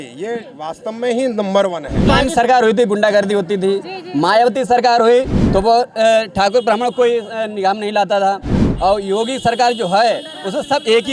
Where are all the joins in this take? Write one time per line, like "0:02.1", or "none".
0:02.0